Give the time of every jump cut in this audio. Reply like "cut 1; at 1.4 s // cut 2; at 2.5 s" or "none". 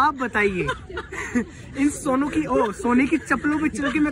none